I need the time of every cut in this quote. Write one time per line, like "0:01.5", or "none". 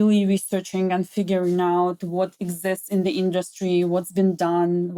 none